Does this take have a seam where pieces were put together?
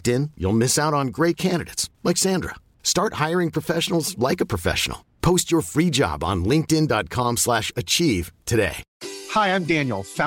yes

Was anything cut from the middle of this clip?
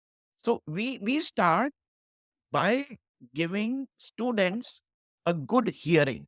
yes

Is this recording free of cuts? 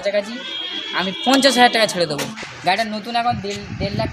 no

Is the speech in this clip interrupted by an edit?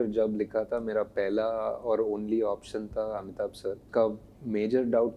yes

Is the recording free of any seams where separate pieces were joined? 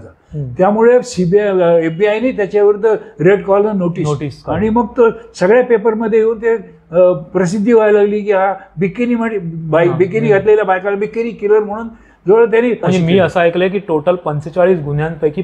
no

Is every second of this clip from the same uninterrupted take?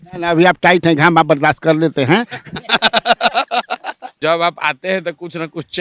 no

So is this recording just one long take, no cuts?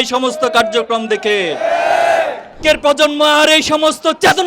no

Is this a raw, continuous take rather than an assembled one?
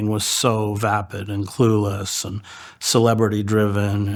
yes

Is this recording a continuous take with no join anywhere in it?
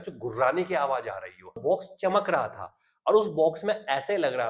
no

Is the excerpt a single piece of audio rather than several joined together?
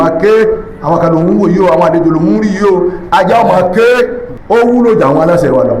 no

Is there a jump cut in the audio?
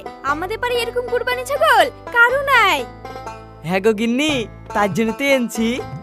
no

